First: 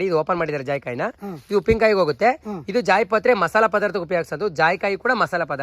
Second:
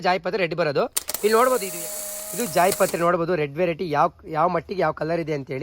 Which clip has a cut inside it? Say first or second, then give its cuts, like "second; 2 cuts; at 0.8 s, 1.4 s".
second; 1 cut; at 1.7 s